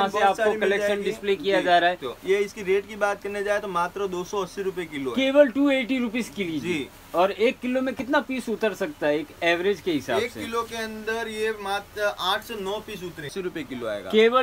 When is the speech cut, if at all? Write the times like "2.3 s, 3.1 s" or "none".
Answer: 2.1 s, 13.3 s